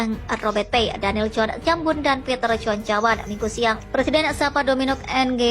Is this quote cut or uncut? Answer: cut